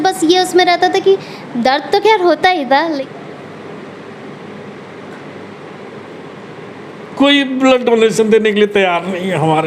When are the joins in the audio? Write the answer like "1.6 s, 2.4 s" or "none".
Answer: 2.9 s